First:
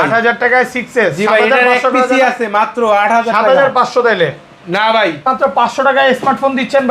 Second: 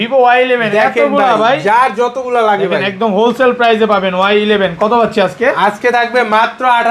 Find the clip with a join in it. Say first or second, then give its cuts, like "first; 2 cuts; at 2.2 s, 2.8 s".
first; 1 cut; at 5.3 s